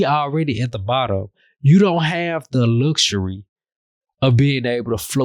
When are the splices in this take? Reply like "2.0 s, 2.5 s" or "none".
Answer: none